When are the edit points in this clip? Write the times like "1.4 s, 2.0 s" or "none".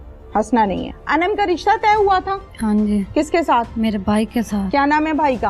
1.0 s